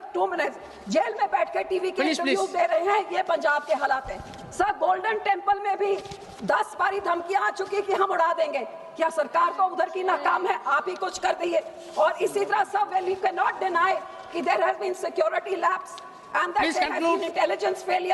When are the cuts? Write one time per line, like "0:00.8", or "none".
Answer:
none

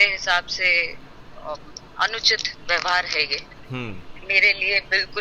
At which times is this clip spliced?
none

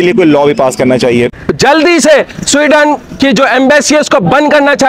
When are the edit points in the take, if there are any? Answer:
0:01.3

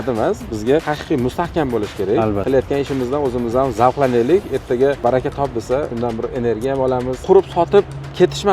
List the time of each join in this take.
0:00.9
0:02.4
0:05.0
0:05.9
0:07.2

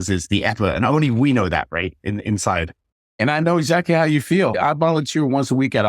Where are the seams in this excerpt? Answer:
0:03.2
0:04.5

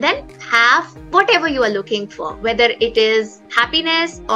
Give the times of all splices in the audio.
0:03.4

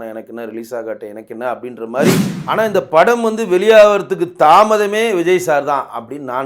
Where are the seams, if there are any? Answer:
0:02.3

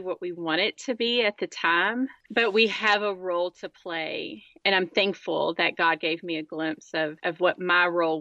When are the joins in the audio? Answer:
none

